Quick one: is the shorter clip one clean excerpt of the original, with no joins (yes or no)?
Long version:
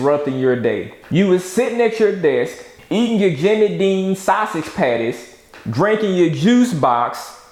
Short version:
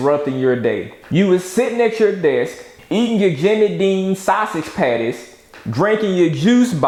yes